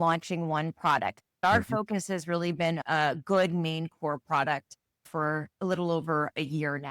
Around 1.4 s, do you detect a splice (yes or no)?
yes